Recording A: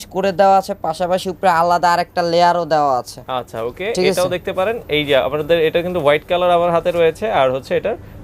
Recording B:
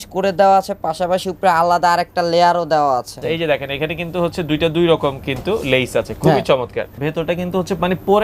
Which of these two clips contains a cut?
B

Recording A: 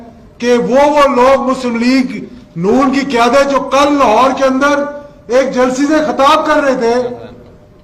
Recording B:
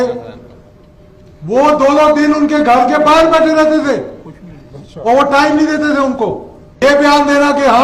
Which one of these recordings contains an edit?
B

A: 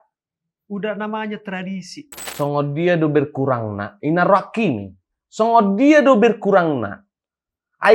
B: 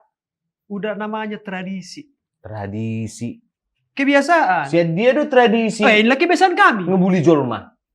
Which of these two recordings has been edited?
A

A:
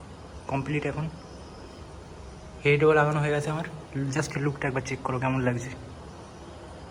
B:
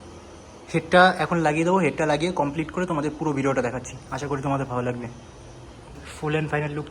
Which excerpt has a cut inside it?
B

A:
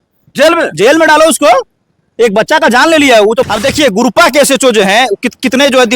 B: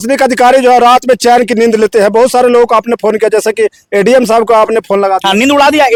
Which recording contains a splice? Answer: A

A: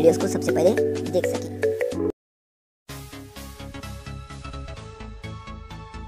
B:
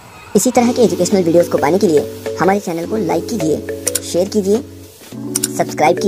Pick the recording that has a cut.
A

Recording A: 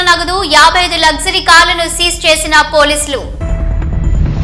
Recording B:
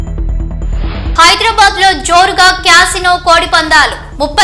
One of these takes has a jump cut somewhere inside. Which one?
B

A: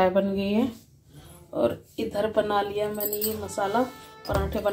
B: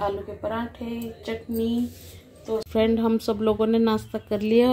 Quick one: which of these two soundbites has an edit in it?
B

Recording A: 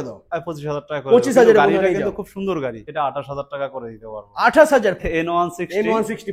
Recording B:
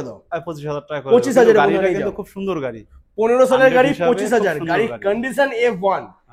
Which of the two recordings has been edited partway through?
A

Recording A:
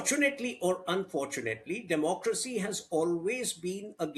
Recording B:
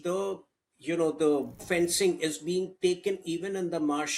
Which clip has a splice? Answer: B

